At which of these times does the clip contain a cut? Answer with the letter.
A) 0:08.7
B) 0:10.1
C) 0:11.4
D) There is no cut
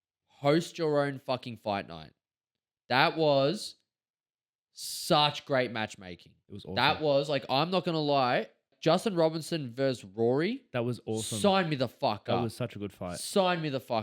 A